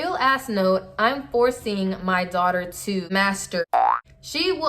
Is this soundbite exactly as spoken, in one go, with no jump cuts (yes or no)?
no